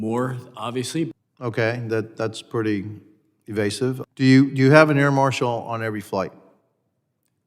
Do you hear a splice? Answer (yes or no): yes